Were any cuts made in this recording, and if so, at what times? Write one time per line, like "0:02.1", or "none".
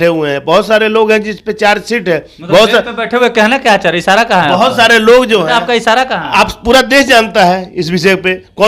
none